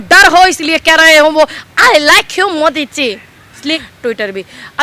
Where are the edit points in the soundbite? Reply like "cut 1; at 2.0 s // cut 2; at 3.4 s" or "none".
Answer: cut 1; at 3.8 s